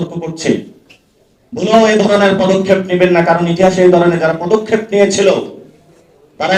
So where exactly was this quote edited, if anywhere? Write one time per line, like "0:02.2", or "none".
none